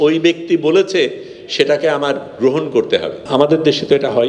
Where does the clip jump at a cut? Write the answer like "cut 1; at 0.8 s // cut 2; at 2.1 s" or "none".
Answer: cut 1; at 3.2 s

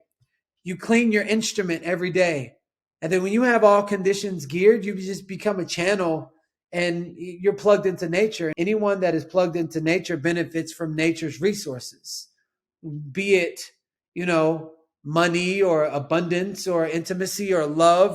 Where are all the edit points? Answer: cut 1; at 8.5 s

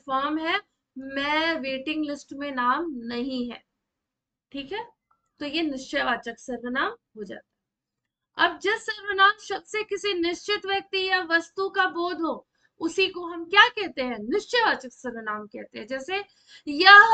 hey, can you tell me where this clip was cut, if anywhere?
none

